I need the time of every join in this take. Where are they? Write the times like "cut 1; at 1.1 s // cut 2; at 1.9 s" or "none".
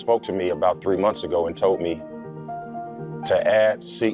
none